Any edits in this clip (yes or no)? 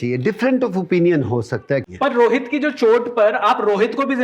yes